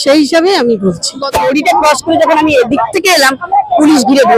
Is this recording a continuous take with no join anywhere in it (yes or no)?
no